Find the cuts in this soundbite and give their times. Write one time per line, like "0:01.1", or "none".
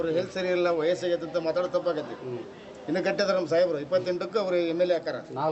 none